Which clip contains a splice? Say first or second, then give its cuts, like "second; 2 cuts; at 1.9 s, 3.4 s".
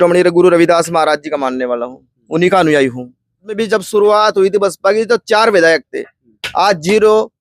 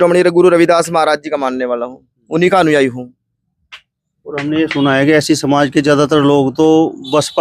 first; 1 cut; at 3.6 s